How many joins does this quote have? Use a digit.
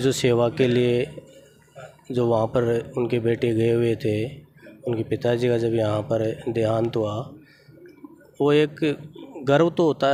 0